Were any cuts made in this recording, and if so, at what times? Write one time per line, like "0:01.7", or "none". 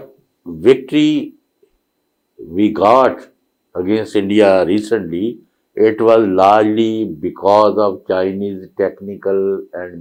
none